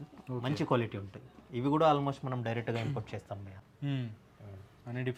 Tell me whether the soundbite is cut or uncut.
uncut